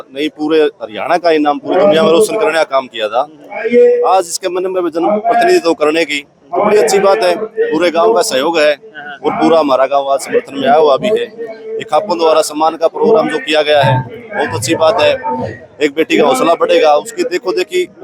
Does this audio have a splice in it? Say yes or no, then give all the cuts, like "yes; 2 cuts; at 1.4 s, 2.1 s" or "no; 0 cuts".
no; 0 cuts